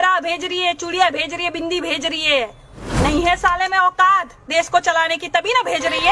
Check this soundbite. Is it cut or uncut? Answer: uncut